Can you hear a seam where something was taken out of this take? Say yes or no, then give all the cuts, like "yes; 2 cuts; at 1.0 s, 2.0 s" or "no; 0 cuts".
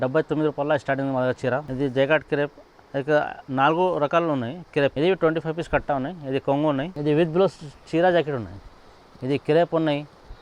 yes; 3 cuts; at 1.7 s, 4.9 s, 6.9 s